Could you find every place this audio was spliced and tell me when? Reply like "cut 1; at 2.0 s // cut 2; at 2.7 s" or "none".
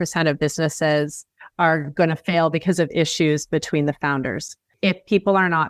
none